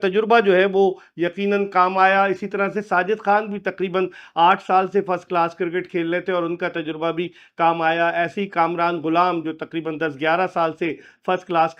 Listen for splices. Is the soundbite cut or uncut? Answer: uncut